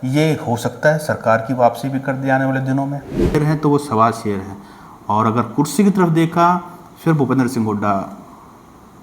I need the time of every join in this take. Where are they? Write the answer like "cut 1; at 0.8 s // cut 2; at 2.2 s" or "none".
cut 1; at 3.3 s